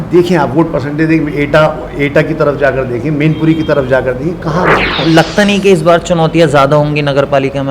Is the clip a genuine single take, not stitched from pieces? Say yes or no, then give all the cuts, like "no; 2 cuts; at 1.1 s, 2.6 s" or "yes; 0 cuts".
no; 1 cut; at 5.0 s